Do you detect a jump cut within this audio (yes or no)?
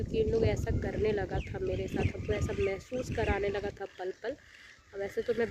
no